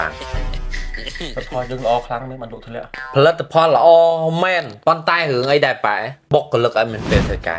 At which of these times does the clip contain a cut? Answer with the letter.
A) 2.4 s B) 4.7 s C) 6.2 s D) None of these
C